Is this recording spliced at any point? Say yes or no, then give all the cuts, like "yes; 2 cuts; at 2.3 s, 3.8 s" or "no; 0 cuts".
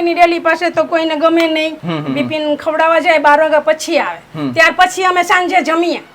yes; 1 cut; at 1.8 s